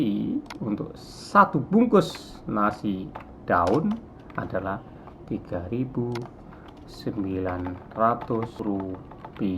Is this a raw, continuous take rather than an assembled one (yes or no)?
no